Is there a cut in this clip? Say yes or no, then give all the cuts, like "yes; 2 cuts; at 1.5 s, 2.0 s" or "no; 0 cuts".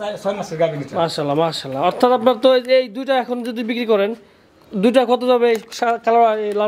no; 0 cuts